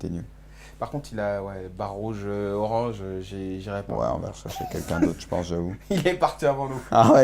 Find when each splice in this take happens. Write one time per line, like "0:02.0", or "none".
0:01.0

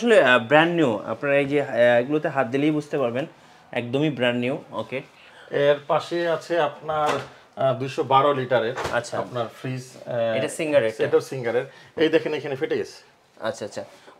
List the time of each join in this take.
none

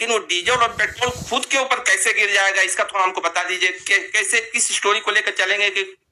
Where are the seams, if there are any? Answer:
none

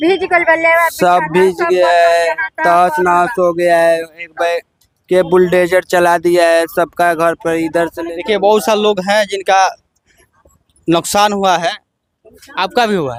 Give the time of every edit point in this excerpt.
none

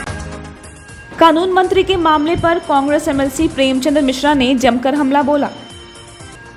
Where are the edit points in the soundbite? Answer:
none

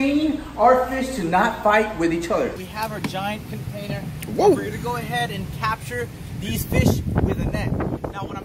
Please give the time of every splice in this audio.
0:02.6

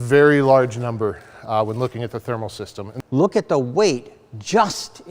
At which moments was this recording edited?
0:02.8

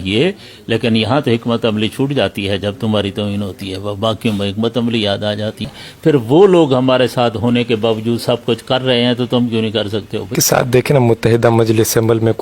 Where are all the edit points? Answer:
0:05.6
0:10.3

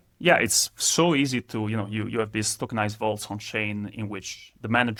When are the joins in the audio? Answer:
none

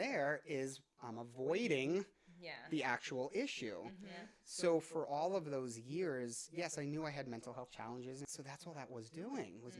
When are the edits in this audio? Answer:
0:08.2

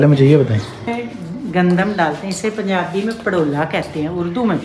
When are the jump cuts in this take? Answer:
0:00.9

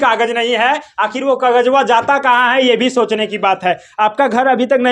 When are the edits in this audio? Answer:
none

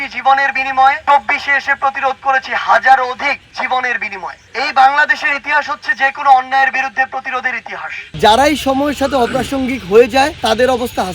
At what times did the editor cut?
0:01.0
0:08.0

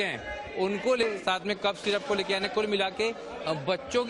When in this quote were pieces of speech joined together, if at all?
0:01.0

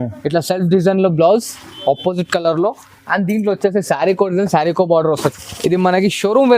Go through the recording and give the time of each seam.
0:05.3

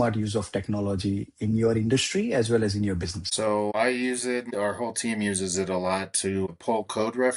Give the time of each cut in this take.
0:03.6
0:04.5
0:06.5

